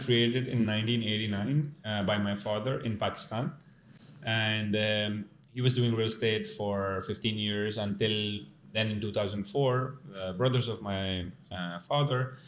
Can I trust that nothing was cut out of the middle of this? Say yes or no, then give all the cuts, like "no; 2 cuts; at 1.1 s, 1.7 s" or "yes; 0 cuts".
yes; 0 cuts